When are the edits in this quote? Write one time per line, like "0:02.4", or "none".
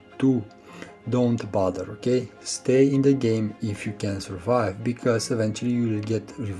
none